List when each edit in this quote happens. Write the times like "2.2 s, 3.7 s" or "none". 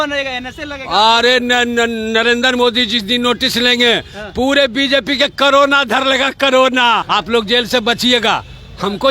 7.0 s